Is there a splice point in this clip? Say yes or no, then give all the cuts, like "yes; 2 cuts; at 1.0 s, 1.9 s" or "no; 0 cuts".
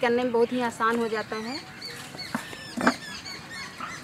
no; 0 cuts